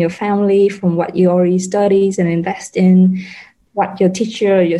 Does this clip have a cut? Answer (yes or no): yes